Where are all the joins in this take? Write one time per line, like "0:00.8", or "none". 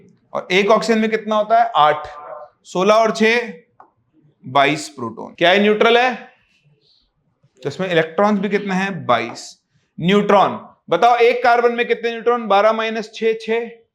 0:05.2